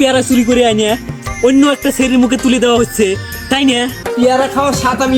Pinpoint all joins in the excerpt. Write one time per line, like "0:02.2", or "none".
0:04.0